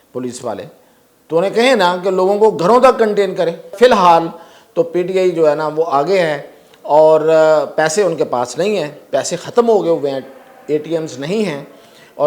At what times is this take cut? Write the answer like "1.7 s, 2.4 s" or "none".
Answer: 3.7 s